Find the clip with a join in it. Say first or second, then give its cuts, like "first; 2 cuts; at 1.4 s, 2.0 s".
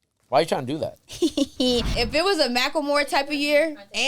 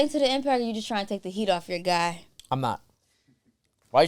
first; 1 cut; at 1.9 s